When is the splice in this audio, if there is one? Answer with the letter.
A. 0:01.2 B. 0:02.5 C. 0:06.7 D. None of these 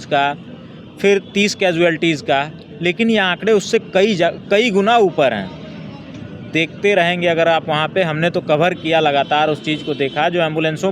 D